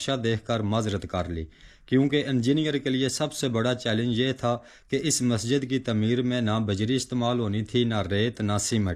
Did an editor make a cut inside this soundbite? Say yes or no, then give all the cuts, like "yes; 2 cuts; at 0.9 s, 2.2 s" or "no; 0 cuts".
no; 0 cuts